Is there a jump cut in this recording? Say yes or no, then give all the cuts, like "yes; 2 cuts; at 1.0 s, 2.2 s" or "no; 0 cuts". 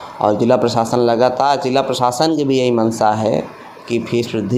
no; 0 cuts